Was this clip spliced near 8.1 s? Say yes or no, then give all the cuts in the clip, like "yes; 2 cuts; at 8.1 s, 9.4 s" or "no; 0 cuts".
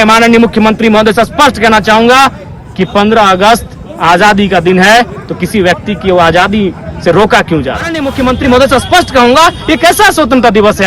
yes; 1 cut; at 8.1 s